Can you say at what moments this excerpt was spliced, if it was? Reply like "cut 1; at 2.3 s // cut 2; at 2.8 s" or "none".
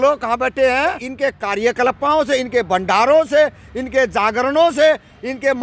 cut 1; at 1.1 s